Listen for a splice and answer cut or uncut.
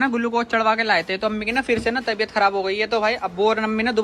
uncut